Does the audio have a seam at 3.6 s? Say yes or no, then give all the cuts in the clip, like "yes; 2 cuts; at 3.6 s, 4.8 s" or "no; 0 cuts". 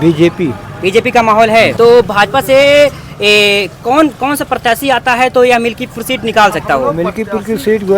no; 1 cut; at 1.7 s